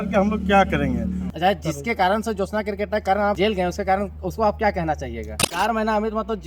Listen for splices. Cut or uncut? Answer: cut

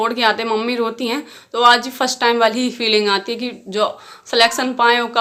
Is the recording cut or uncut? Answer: uncut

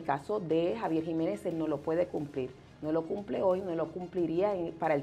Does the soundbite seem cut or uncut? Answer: uncut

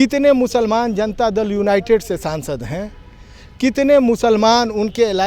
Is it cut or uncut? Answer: uncut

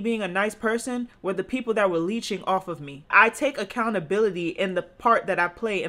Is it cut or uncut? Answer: cut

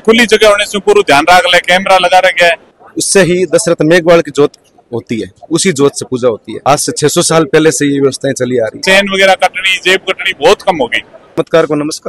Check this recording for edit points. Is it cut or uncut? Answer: cut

